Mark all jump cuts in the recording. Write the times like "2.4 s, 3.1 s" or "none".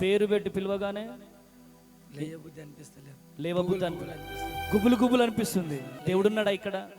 5.9 s